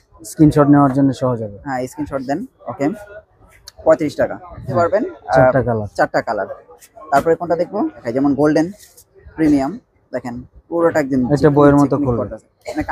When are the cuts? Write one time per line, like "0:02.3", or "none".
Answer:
0:04.7
0:08.1

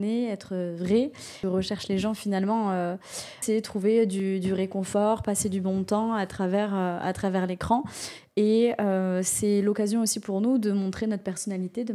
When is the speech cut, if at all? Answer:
0:01.3
0:03.4

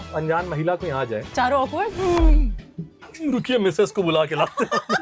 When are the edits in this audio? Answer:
none

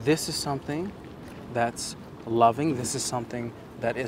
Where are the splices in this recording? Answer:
none

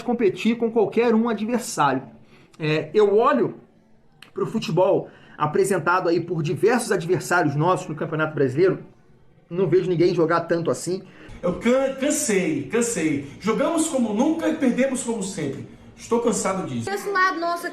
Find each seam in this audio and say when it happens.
0:11.2
0:16.9

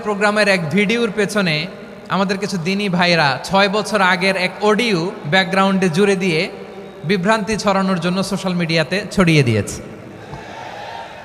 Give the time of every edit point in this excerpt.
none

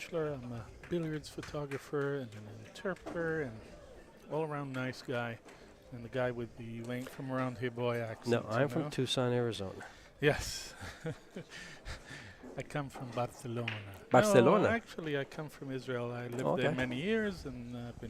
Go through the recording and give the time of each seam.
0:16.9

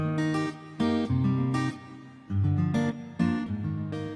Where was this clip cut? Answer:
none

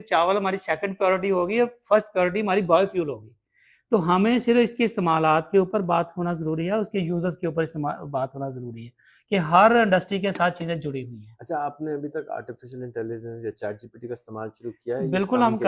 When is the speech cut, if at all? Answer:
none

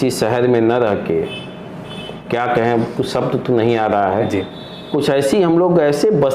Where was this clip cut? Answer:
0:02.1

